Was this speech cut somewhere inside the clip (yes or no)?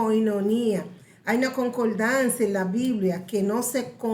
no